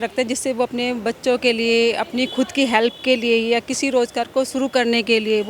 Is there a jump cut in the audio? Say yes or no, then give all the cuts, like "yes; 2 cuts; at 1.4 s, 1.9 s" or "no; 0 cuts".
no; 0 cuts